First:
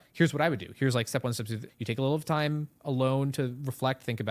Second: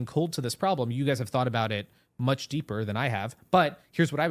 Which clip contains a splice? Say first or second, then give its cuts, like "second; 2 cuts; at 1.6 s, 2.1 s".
first; 1 cut; at 1.7 s